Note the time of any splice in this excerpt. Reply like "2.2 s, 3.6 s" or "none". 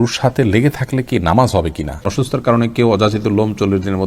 2.0 s